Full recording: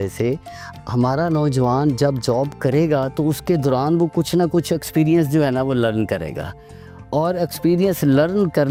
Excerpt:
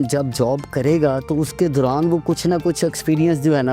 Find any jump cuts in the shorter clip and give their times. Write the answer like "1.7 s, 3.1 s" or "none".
none

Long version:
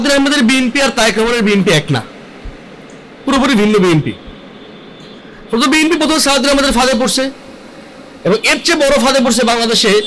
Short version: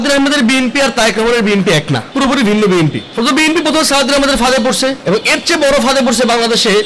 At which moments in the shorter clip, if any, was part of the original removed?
2.1 s, 3.0 s, 5.0 s

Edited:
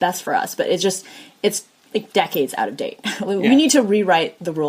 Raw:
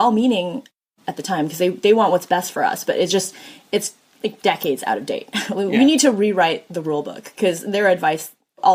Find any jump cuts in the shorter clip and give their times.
none

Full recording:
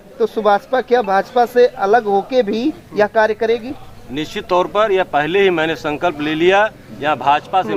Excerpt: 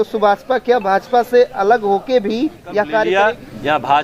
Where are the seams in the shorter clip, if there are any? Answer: 3.1 s

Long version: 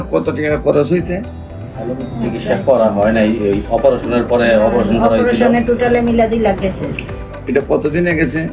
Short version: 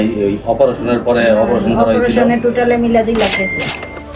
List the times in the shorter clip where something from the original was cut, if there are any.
none

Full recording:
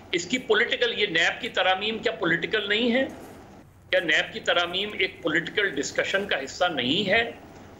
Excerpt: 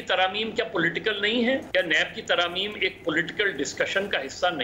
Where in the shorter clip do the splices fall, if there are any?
1.7 s

